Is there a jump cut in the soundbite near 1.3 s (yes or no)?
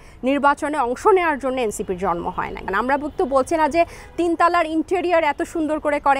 no